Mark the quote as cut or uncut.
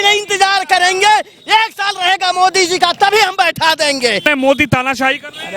cut